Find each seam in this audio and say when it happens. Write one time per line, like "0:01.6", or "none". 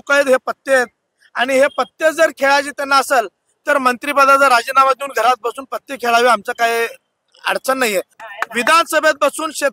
0:08.2

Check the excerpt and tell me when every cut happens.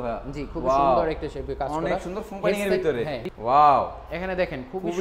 0:03.3

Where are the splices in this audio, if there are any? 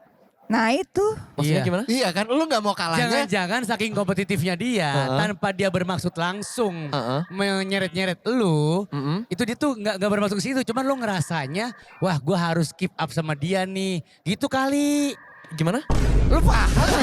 none

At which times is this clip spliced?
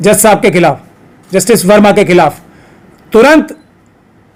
none

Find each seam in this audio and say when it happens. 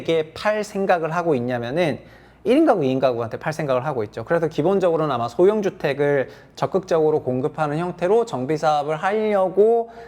none

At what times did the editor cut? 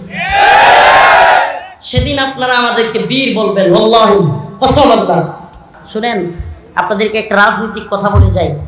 0:05.7

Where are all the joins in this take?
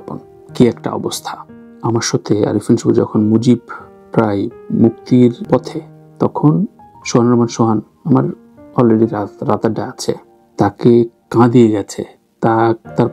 0:01.6

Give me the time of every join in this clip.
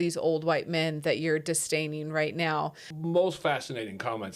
0:02.9

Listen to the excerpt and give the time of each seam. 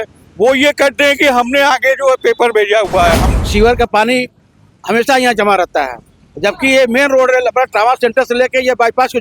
0:03.3

